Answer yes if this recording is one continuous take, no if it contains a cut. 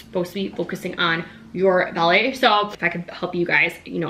no